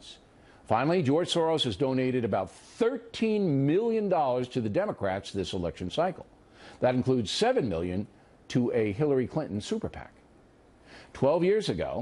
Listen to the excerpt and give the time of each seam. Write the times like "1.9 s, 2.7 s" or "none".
none